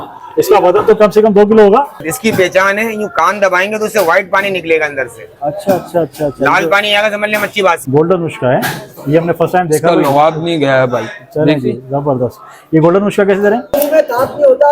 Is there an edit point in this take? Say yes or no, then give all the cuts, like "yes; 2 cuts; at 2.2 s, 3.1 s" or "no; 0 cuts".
yes; 3 cuts; at 2.1 s, 7.8 s, 13.8 s